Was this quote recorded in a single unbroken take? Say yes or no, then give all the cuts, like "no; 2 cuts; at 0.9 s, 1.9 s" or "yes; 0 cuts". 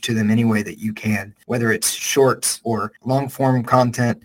no; 2 cuts; at 1.3 s, 2.8 s